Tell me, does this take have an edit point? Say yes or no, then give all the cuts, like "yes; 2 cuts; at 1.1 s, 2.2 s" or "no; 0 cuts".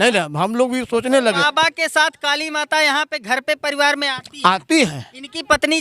yes; 1 cut; at 1.4 s